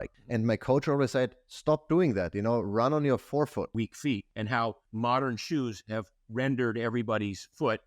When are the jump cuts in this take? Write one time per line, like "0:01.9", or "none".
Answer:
0:03.7